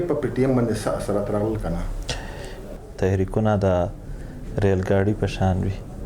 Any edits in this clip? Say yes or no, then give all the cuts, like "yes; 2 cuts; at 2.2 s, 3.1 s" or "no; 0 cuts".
yes; 1 cut; at 2.7 s